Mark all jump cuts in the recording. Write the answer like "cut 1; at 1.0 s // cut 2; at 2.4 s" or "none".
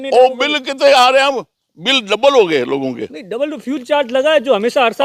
none